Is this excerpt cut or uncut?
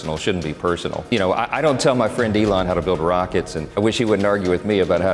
cut